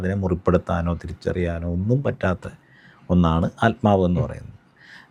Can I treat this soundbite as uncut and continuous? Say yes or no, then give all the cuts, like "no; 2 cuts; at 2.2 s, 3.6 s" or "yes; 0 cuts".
yes; 0 cuts